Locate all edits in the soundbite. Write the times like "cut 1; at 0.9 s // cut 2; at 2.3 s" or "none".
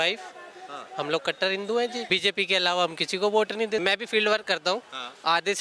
cut 1; at 2.0 s // cut 2; at 3.8 s

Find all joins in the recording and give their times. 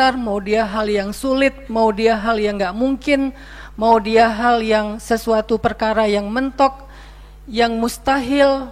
none

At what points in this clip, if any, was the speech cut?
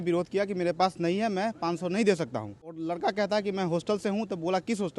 cut 1; at 2.8 s

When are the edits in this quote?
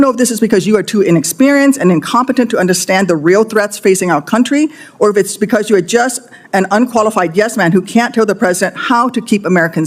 none

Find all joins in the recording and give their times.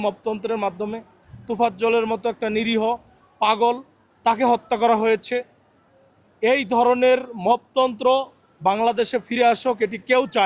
none

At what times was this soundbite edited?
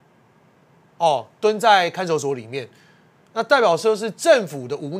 none

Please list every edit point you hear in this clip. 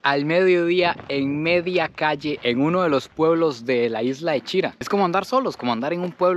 cut 1; at 4.7 s

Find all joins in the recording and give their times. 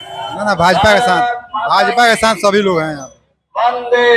none

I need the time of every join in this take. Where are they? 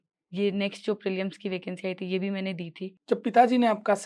cut 1; at 3.0 s

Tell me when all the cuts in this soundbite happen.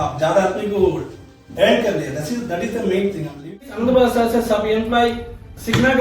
cut 1; at 3.6 s

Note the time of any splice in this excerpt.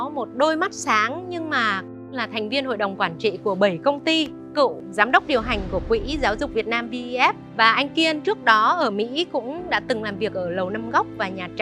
cut 1; at 2.1 s // cut 2; at 4.4 s // cut 3; at 7.5 s

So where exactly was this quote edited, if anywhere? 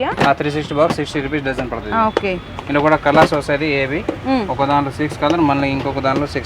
none

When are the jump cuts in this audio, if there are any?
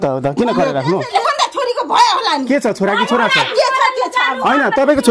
cut 1; at 1.1 s

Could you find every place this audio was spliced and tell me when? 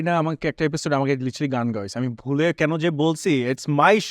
none

